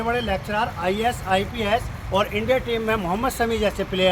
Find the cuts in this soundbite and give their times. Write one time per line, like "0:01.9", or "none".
none